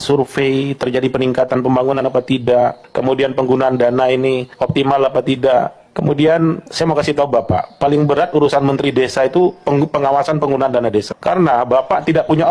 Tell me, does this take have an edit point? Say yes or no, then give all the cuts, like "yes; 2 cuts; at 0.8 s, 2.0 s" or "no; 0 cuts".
no; 0 cuts